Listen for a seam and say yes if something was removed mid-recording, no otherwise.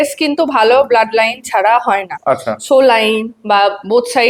no